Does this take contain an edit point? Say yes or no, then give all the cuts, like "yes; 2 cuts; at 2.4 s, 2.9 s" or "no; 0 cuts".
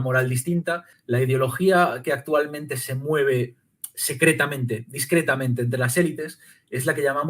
yes; 1 cut; at 0.9 s